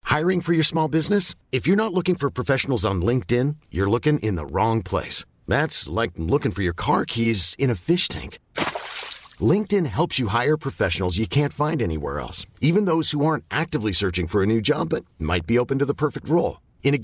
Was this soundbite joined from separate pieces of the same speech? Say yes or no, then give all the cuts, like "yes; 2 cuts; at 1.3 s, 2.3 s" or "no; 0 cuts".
no; 0 cuts